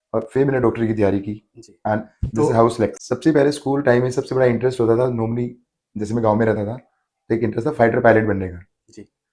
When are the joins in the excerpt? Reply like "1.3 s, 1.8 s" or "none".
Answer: 3.0 s